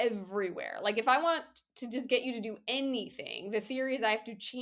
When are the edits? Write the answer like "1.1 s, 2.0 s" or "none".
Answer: none